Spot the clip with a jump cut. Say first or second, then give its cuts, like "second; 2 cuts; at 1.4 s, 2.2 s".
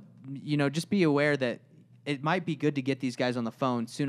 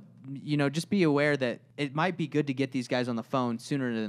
second; 1 cut; at 1.7 s